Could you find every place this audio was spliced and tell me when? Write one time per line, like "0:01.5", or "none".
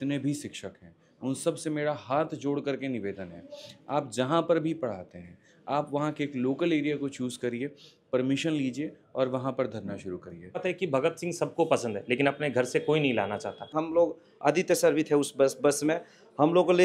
0:10.6
0:13.8